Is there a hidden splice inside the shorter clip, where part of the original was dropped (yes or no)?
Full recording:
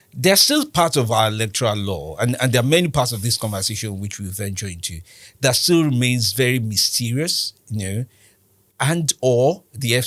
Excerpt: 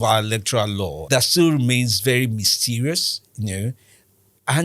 yes